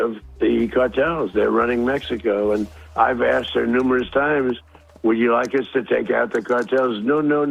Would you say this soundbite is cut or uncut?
uncut